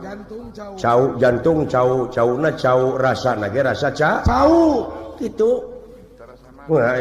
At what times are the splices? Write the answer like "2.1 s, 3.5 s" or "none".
none